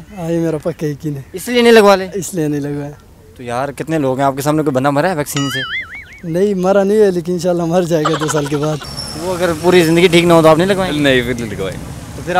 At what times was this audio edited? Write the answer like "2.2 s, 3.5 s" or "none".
8.8 s

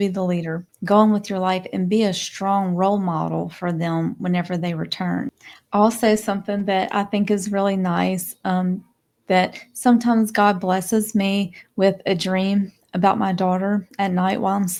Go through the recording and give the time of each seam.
none

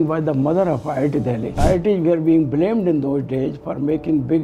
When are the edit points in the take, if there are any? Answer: 1.6 s

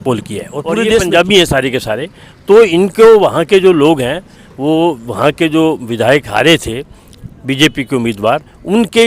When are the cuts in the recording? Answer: 1.0 s

